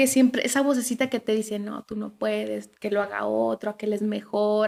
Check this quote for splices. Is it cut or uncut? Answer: uncut